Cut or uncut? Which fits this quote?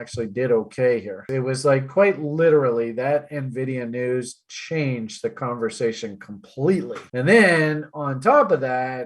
cut